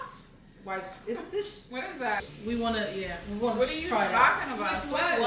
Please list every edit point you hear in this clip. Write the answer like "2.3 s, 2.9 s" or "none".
2.2 s